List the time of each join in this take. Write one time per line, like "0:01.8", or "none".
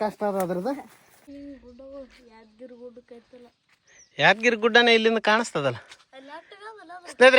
0:01.2